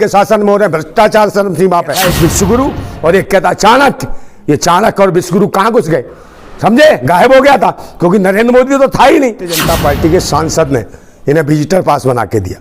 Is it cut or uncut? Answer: cut